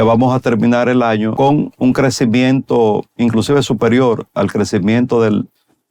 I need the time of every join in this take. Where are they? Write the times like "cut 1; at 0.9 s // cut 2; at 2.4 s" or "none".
cut 1; at 1.3 s // cut 2; at 3.1 s